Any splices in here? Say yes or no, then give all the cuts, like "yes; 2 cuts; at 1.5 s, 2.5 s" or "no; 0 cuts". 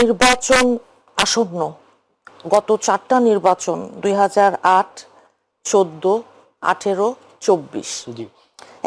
no; 0 cuts